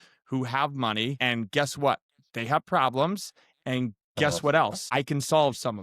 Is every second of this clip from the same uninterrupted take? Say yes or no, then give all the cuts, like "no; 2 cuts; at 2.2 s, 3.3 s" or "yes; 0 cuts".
no; 2 cuts; at 1.2 s, 4.8 s